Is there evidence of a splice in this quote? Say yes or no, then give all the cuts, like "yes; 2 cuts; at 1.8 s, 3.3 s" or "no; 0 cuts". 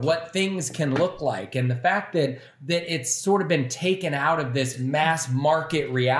yes; 1 cut; at 4.8 s